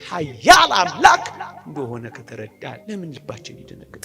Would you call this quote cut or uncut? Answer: cut